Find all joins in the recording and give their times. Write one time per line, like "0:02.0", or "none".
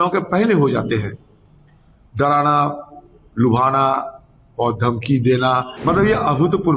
0:05.7